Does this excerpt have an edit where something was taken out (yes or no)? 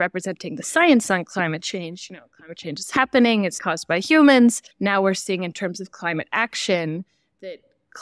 yes